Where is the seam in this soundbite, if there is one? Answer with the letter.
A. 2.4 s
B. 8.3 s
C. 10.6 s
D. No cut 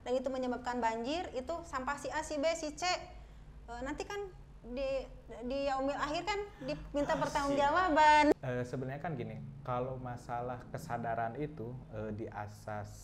B